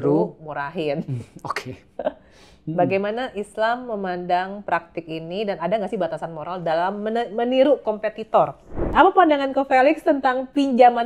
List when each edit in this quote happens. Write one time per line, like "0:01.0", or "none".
0:05.6
0:08.9